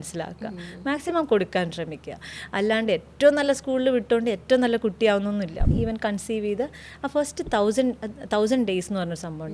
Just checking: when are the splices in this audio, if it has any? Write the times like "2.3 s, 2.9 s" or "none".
5.7 s